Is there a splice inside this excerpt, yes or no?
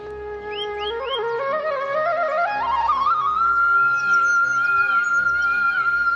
no